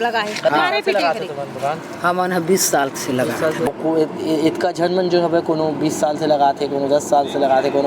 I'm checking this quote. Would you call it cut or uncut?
cut